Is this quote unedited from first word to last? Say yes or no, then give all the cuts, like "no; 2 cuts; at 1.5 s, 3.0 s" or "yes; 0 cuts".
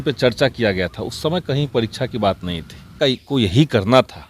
no; 1 cut; at 3.0 s